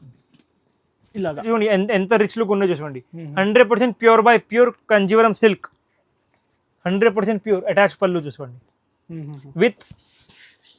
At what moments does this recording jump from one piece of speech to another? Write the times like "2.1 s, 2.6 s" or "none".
1.4 s